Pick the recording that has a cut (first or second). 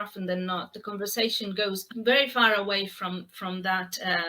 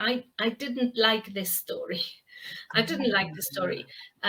first